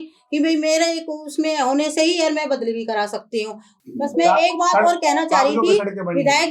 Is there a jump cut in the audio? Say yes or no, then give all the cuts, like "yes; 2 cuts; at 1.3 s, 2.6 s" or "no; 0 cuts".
yes; 1 cut; at 3.7 s